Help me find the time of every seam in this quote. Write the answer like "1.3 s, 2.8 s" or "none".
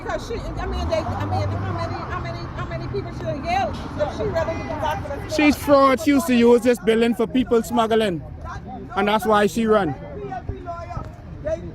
9.1 s